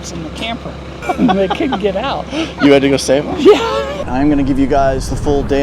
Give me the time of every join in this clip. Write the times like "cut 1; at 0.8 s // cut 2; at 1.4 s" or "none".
cut 1; at 0.9 s // cut 2; at 4.0 s